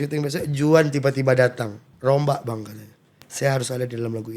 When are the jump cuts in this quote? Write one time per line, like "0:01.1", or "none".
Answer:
0:01.8